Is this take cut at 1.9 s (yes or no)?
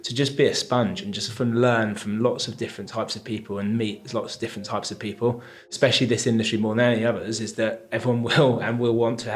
no